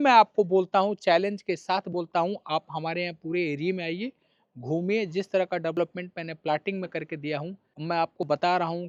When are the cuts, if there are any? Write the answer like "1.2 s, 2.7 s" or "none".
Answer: none